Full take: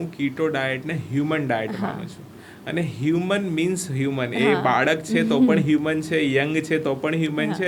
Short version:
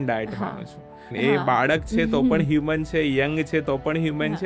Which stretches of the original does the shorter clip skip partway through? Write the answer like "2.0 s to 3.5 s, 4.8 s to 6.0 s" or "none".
2.5 s to 4.3 s